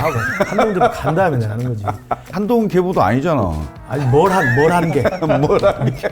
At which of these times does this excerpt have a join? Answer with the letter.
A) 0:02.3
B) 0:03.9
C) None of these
A